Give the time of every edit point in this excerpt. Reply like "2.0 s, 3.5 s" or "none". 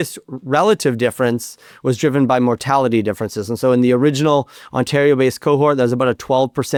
none